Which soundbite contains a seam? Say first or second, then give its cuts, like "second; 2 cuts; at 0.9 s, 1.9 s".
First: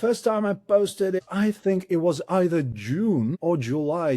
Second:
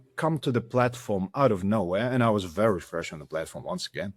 first; 2 cuts; at 1.2 s, 3.3 s